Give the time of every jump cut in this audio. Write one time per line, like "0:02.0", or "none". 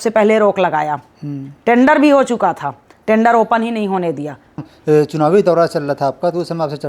0:04.7